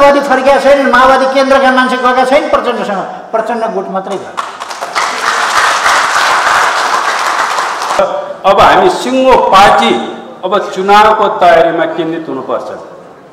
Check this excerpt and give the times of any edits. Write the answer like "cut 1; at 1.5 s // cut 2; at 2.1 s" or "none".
cut 1; at 8.0 s